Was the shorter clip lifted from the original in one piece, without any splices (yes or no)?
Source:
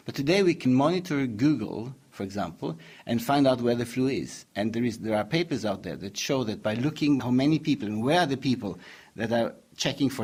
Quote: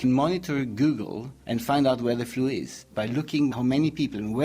no